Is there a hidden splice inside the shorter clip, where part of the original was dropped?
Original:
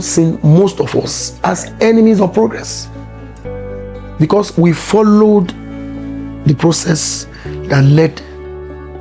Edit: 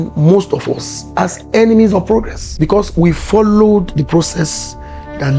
yes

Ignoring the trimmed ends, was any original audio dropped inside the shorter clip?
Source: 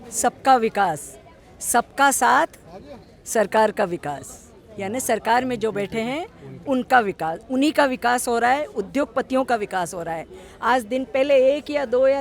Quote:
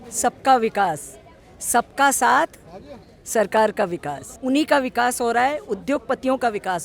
yes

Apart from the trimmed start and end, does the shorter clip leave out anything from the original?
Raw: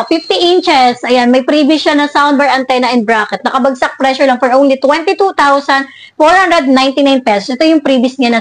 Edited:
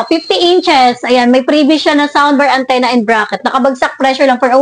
no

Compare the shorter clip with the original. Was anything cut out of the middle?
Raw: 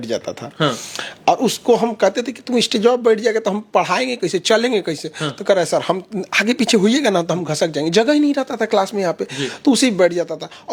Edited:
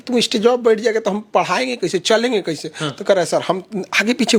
no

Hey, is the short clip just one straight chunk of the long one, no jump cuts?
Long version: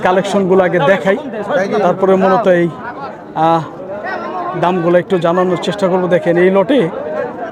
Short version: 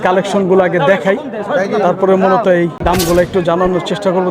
no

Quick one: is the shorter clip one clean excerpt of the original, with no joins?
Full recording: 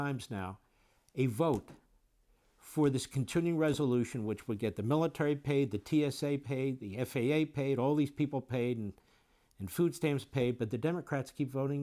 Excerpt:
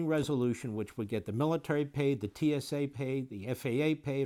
yes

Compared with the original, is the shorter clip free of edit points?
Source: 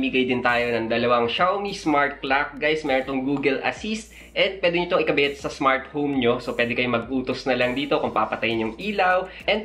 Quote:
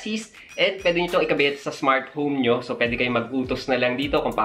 yes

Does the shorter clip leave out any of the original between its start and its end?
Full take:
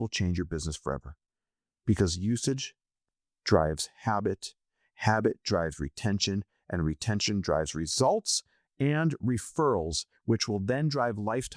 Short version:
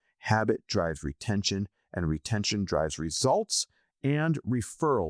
no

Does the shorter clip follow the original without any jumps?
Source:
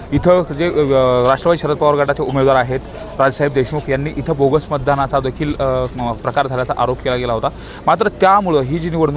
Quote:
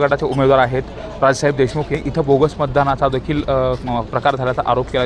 no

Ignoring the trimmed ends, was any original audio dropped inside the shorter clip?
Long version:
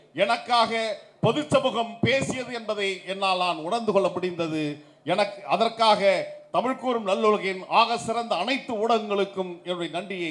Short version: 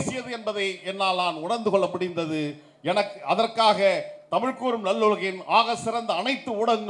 no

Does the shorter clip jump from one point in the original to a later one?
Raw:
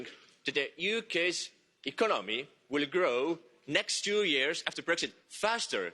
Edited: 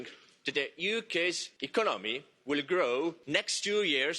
yes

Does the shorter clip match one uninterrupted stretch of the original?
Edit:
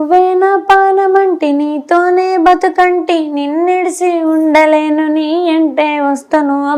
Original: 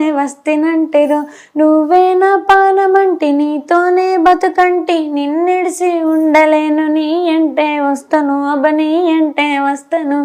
yes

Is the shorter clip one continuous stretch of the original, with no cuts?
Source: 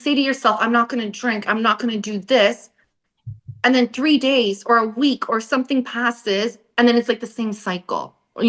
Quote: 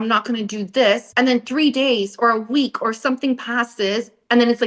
no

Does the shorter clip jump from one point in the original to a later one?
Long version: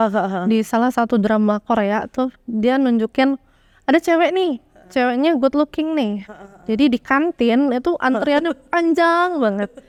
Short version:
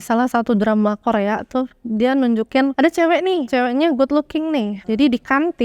yes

